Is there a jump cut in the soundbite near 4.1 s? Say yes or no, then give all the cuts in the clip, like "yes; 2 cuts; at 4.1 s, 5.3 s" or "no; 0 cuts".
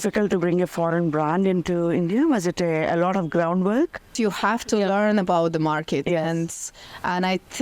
yes; 1 cut; at 4.1 s